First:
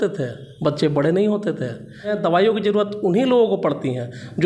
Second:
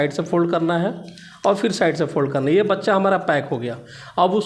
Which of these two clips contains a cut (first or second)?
first